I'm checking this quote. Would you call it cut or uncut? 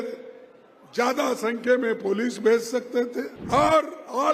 cut